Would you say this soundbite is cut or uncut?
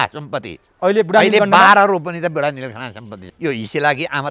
cut